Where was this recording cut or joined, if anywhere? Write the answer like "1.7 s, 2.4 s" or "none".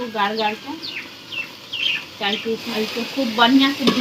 2.7 s